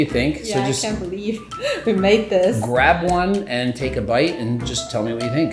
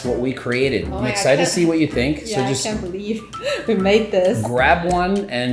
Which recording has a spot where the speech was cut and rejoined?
second; 1 cut; at 0.9 s

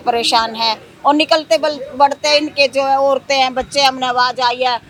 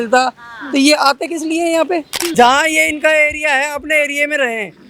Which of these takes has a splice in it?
second; 1 cut; at 2.2 s

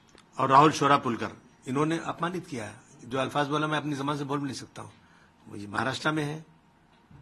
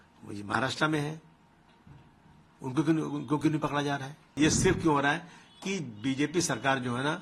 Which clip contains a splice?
second; 1 cut; at 4.3 s

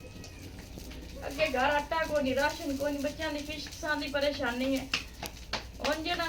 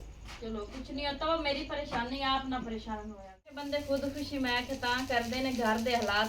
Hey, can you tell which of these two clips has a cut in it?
second; 1 cut; at 3.7 s

